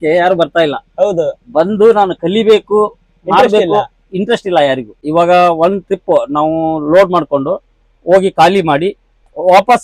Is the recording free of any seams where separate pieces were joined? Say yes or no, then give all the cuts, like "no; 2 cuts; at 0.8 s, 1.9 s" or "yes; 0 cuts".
no; 1 cut; at 4.9 s